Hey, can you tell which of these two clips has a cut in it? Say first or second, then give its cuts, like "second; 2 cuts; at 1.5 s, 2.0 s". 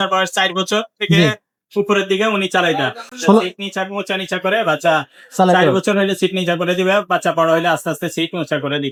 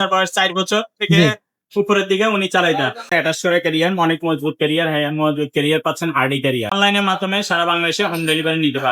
second; 2 cuts; at 3.1 s, 6.7 s